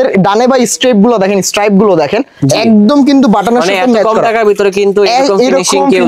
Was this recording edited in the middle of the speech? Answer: no; 0 cuts

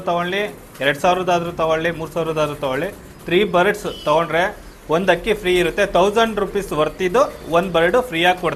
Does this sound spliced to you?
no; 0 cuts

